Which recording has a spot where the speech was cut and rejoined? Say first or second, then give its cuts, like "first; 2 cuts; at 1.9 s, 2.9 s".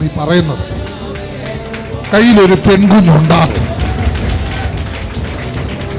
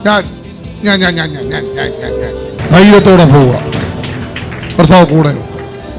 second; 1 cut; at 2.5 s